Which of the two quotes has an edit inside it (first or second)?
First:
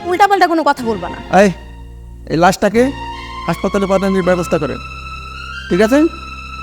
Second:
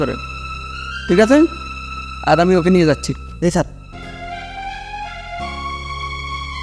first